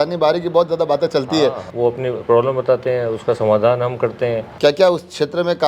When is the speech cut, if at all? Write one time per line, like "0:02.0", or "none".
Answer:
0:01.7
0:04.5